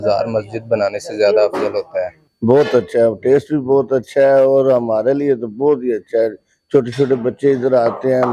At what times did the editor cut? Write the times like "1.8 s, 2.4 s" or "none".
none